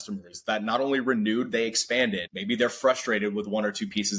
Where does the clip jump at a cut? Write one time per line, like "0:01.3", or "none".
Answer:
0:02.3